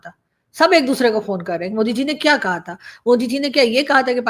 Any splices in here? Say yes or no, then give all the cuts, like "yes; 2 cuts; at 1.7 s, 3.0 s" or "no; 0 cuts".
no; 0 cuts